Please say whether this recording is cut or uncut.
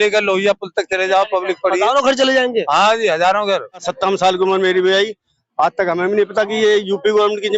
cut